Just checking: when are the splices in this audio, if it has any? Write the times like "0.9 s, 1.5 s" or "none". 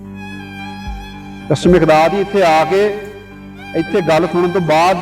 1.5 s